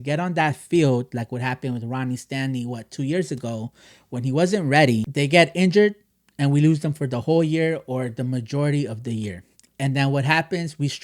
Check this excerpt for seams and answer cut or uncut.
cut